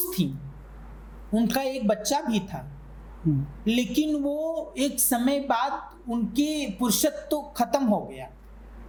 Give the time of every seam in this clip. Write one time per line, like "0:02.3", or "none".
none

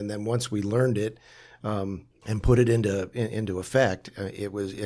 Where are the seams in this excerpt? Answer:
0:02.1

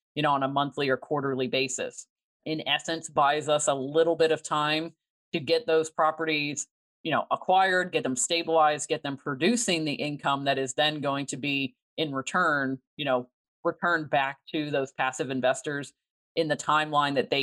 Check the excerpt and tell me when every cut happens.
0:02.4
0:13.4

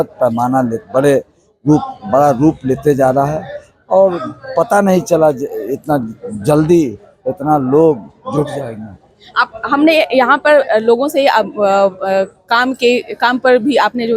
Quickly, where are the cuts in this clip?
none

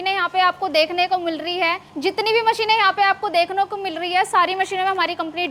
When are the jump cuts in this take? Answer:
0:01.9

